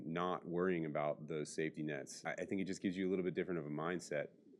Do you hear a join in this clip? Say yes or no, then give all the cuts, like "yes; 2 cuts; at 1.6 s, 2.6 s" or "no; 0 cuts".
yes; 1 cut; at 2.1 s